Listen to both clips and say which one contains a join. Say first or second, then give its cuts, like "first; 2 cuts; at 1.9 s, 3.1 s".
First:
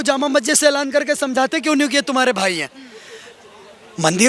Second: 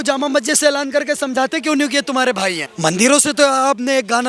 second; 1 cut; at 2.7 s